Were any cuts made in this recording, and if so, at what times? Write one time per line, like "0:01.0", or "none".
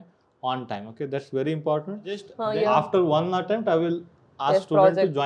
0:02.3